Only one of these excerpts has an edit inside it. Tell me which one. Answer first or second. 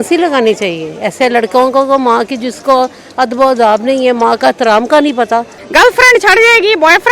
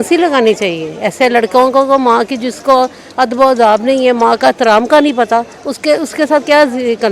first